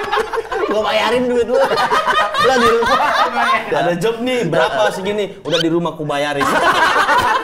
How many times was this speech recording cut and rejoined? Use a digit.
1